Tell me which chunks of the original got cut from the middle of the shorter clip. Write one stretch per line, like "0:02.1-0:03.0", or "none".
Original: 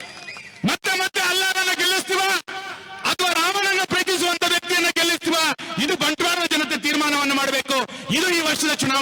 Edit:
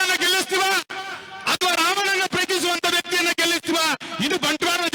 none